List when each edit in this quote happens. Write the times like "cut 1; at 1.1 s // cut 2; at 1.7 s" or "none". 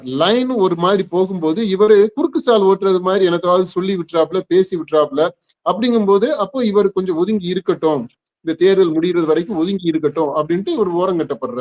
none

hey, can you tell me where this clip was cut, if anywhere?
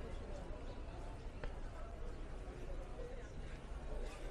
none

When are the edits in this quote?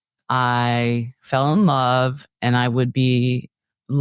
none

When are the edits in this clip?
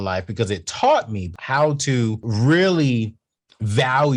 cut 1; at 1.3 s // cut 2; at 2.2 s

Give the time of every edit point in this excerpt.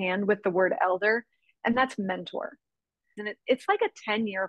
cut 1; at 3.2 s

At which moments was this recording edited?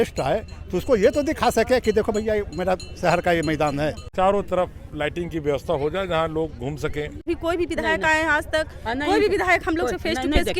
cut 1; at 4.0 s // cut 2; at 7.3 s

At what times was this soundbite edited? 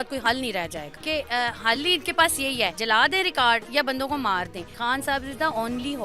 cut 1; at 1.0 s // cut 2; at 2.8 s // cut 3; at 4.7 s

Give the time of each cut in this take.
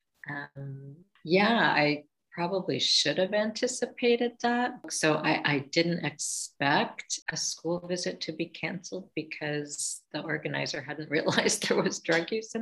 cut 1; at 4.9 s

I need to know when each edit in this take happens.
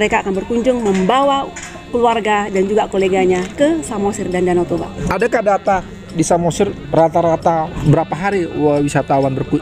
cut 1; at 4.9 s // cut 2; at 7.8 s

